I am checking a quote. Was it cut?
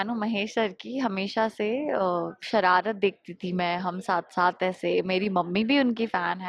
no; 0 cuts

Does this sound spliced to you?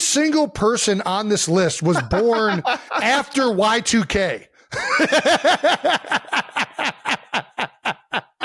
no; 0 cuts

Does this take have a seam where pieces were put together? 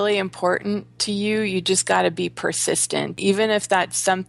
yes; 1 cut; at 3.2 s

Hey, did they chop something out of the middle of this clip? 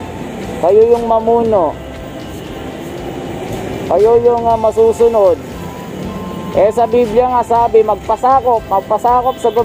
no; 0 cuts

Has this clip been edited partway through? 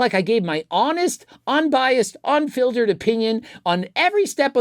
no; 0 cuts

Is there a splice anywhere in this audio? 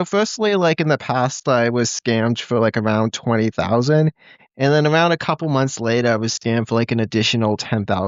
no; 0 cuts

